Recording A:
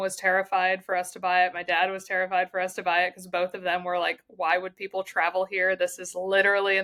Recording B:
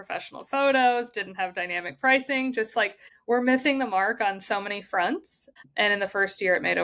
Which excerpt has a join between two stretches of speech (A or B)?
B